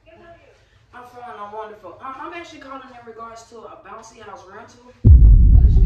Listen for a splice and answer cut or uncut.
cut